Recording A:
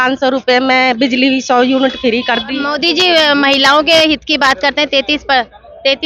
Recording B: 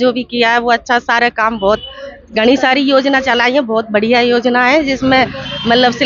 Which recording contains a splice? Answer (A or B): A